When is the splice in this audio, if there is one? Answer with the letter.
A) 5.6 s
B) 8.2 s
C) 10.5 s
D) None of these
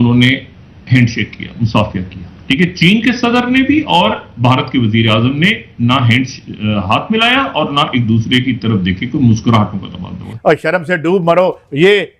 C